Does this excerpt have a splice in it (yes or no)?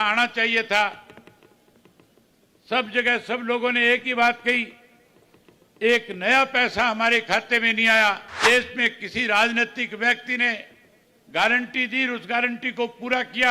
yes